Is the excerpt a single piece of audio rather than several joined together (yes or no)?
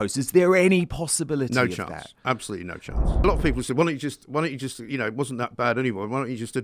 no